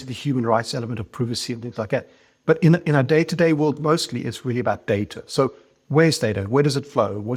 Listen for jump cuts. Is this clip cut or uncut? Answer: uncut